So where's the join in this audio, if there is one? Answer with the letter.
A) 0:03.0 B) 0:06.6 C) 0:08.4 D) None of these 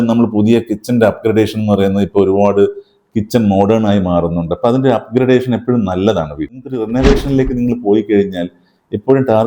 B